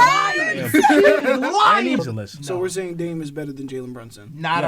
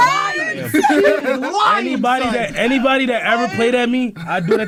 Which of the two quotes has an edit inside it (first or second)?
first